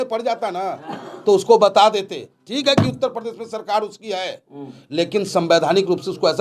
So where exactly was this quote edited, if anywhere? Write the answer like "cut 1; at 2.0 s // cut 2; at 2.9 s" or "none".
none